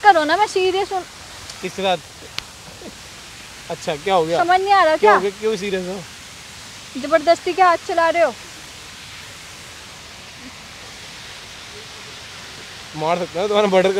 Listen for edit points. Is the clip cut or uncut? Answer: uncut